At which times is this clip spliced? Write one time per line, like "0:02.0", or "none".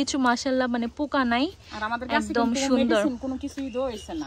none

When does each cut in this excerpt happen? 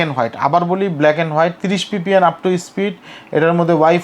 none

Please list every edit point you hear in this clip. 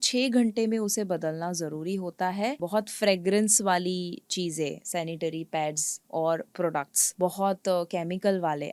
0:02.6
0:07.0

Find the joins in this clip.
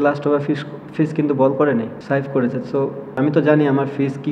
0:02.0
0:03.1

